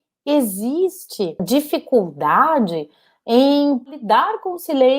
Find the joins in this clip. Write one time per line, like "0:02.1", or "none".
0:01.4
0:03.9